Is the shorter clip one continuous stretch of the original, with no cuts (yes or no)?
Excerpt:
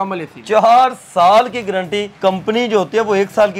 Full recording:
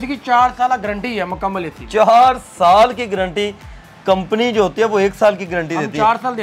no